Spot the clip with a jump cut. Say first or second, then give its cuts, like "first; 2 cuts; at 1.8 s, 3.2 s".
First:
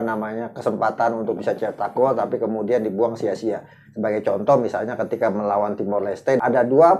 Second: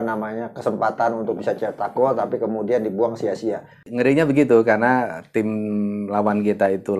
second; 1 cut; at 3.9 s